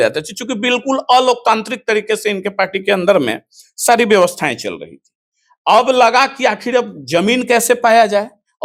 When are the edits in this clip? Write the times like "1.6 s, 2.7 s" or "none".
none